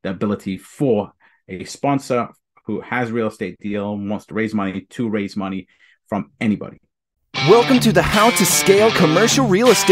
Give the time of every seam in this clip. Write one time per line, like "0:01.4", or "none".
0:07.1